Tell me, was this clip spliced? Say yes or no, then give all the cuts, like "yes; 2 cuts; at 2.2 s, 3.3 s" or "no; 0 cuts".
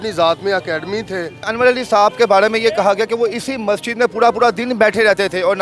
yes; 1 cut; at 1.4 s